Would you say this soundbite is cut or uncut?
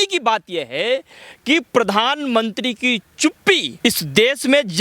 cut